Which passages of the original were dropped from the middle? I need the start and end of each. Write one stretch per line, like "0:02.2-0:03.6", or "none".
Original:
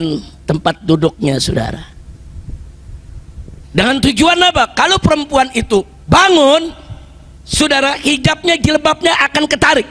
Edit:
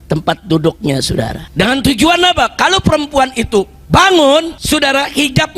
0:01.8-0:03.6
0:06.7-0:07.4